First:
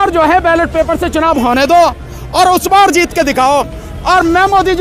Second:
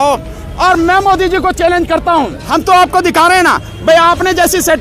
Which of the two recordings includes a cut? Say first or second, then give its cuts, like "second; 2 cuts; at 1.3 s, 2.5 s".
second; 1 cut; at 2.4 s